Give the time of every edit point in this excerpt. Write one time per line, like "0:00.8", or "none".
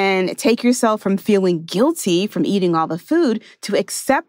none